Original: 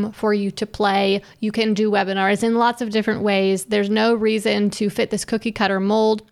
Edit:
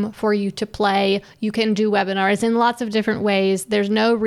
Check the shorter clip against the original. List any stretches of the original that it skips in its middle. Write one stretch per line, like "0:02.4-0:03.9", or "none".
none